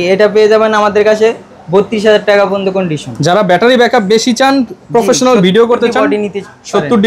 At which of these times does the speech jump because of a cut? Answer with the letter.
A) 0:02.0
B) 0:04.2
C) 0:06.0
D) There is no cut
D